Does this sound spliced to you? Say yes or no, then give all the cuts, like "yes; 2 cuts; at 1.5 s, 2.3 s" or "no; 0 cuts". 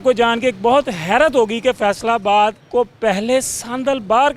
yes; 1 cut; at 2.6 s